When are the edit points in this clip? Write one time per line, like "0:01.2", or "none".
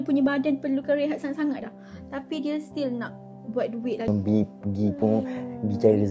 0:04.1